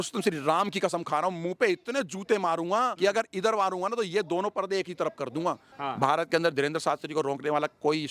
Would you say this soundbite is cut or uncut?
cut